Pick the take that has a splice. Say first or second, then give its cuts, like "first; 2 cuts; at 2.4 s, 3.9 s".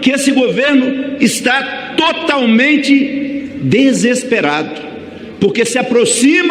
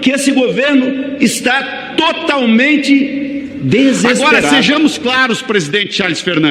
second; 1 cut; at 4.5 s